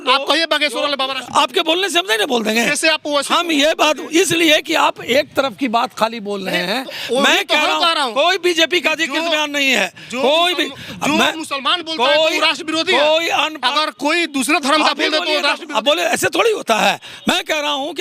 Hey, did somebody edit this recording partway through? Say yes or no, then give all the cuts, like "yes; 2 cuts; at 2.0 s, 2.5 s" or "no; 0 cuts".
no; 0 cuts